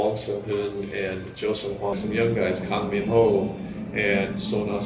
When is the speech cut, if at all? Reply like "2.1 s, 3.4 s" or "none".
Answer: 2.0 s